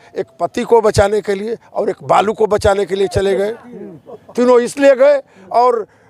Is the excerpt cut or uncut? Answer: uncut